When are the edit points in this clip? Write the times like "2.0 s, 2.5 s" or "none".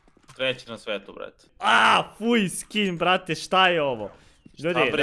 1.5 s